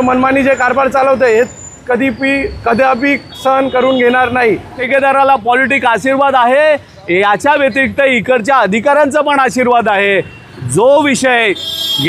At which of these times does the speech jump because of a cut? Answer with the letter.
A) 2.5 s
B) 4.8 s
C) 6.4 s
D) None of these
B